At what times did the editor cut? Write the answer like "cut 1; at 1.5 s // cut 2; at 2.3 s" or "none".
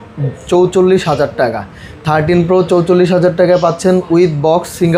none